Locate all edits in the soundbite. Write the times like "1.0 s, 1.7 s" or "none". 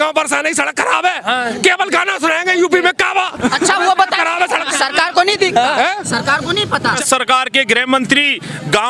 7.0 s